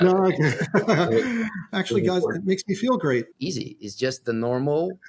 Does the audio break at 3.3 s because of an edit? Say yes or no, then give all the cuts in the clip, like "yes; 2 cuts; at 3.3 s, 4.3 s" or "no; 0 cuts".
yes; 2 cuts; at 1.7 s, 3.3 s